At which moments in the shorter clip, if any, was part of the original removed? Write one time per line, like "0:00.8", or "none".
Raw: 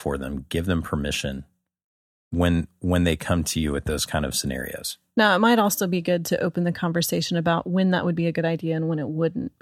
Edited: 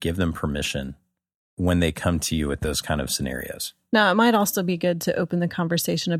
0:01.5

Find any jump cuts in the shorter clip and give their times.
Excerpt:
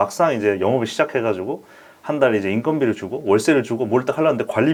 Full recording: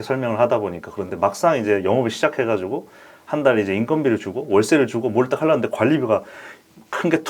none

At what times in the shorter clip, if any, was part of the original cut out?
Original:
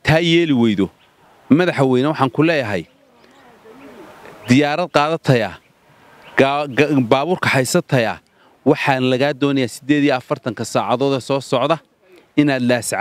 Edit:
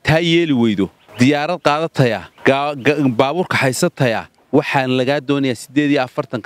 0:01.0
0:02.3
0:04.3

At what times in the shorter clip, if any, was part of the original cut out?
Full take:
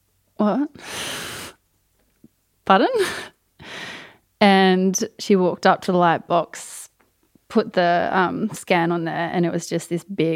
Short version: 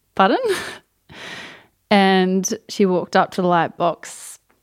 none

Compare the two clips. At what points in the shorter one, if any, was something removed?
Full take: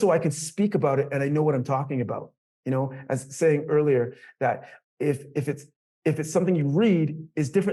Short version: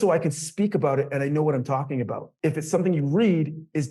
0:02.2

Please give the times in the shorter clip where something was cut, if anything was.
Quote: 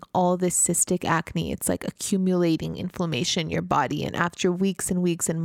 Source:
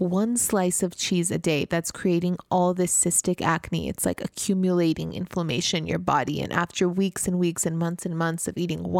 none

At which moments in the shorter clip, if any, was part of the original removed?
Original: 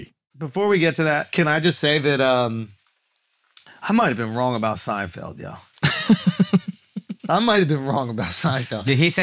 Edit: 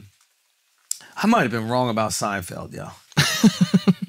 none

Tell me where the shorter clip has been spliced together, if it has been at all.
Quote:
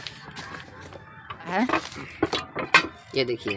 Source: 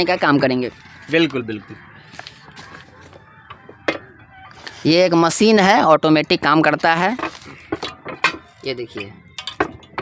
0:01.6

